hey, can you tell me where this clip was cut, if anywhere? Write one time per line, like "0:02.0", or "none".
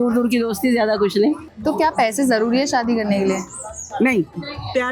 0:01.5